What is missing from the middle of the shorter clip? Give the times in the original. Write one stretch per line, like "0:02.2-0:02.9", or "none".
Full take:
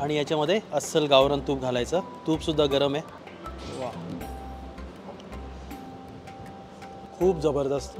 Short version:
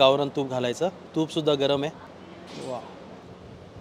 0:04.0-0:05.5